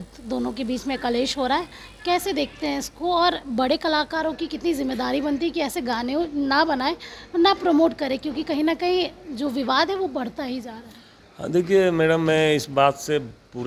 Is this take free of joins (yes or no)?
yes